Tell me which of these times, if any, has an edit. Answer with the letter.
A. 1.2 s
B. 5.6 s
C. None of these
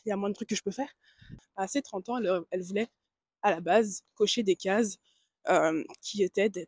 A